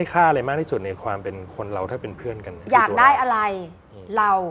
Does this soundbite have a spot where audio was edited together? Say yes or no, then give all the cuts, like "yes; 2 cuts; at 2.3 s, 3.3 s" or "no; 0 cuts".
yes; 1 cut; at 2.6 s